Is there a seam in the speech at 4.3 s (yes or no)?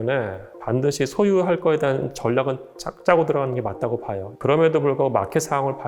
yes